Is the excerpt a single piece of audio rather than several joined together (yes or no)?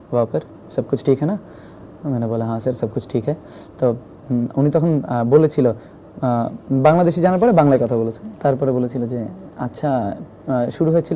yes